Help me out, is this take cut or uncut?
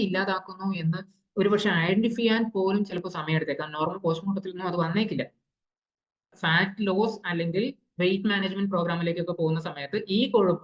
cut